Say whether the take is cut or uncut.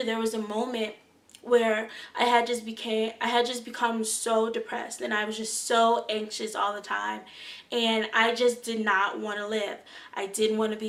uncut